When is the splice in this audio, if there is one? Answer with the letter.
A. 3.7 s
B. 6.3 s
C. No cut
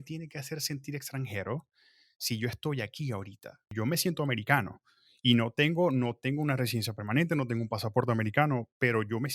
A